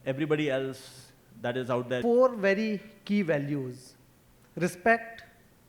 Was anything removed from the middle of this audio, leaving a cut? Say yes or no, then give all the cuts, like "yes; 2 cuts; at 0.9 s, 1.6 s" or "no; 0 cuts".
yes; 1 cut; at 2.0 s